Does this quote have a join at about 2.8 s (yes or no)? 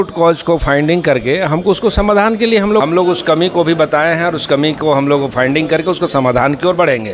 yes